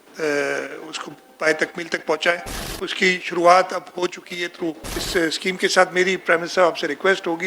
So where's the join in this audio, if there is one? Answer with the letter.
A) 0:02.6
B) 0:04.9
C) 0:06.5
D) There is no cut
B